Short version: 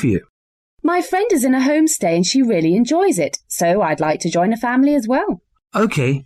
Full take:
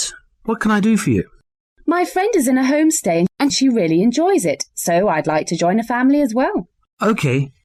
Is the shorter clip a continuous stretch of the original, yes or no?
no